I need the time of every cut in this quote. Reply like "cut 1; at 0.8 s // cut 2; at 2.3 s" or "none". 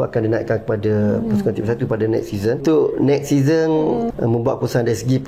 cut 1; at 2.6 s // cut 2; at 4.1 s